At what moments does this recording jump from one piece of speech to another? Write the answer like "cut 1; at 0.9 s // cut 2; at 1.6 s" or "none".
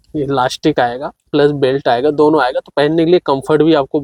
none